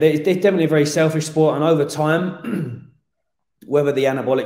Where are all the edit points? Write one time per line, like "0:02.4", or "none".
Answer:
none